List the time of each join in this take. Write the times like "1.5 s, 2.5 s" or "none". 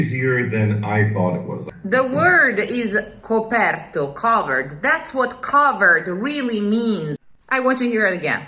1.6 s, 7.3 s